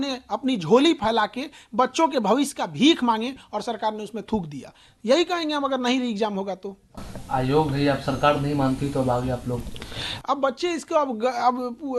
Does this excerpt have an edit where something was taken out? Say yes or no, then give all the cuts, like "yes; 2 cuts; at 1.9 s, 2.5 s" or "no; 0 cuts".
no; 0 cuts